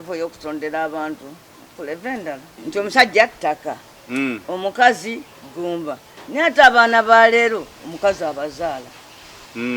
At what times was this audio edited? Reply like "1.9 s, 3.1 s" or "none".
2.5 s

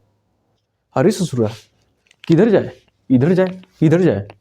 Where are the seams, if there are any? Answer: none

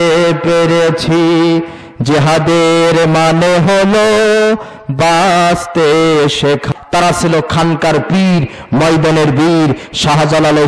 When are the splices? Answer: 6.7 s

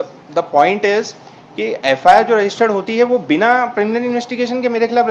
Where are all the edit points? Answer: none

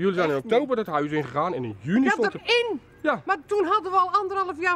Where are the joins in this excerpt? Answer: none

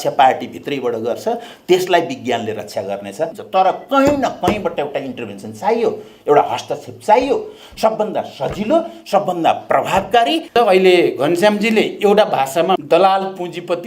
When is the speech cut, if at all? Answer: 3.4 s, 10.5 s, 12.8 s

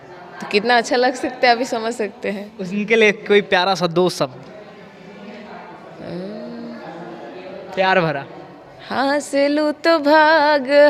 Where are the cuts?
none

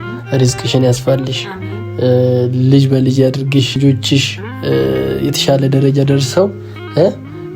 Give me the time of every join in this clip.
3.8 s

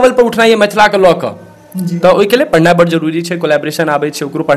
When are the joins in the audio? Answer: none

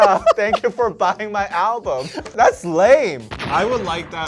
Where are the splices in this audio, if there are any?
2.3 s

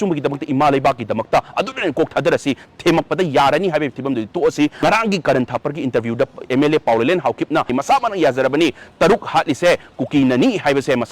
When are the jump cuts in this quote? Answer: 4.8 s, 7.7 s

